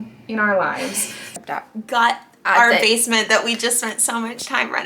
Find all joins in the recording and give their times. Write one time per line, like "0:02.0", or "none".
0:01.2